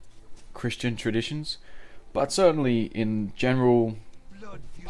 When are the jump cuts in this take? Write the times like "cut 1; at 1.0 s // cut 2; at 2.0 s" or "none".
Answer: cut 1; at 3.3 s